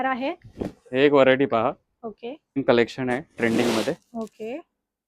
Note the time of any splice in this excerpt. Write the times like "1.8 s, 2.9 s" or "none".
2.4 s